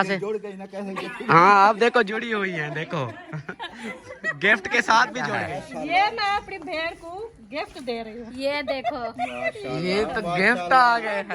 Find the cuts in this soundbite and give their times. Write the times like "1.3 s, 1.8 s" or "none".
5.4 s